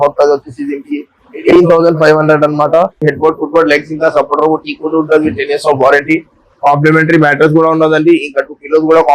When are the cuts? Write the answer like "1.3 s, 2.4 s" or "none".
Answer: 3.0 s